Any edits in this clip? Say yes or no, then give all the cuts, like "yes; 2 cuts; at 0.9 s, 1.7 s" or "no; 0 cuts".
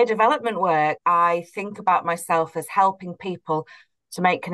yes; 1 cut; at 1.0 s